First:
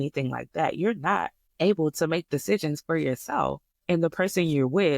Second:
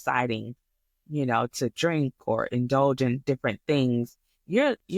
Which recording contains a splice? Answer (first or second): first